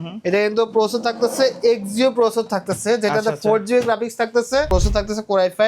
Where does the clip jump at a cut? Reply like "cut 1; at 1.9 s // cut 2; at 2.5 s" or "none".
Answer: cut 1; at 4.7 s